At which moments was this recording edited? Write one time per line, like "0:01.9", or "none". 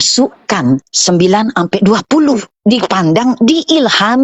0:00.9
0:02.5

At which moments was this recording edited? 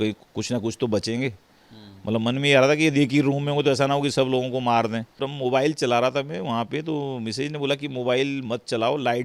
0:05.3

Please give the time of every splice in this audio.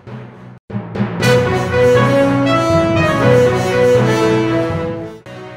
none

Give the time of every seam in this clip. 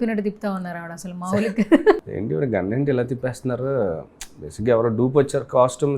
0:02.0

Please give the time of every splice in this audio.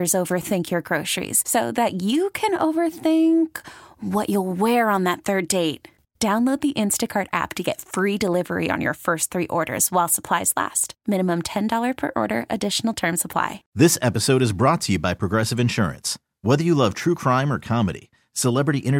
0:13.6

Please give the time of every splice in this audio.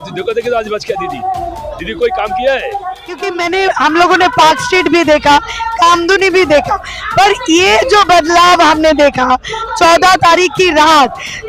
0:03.3

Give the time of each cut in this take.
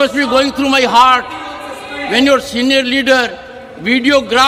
none

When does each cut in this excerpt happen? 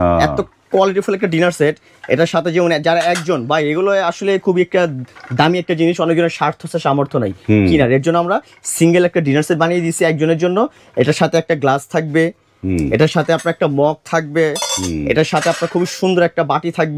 none

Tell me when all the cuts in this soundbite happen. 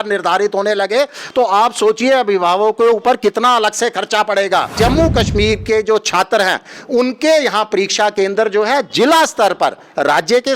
0:04.8

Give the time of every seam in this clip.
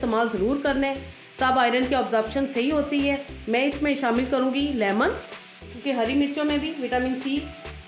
0:05.8

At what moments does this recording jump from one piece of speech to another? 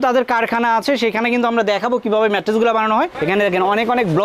0:03.1

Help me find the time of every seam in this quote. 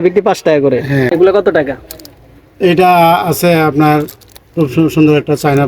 0:01.1

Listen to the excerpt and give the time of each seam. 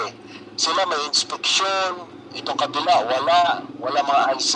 none

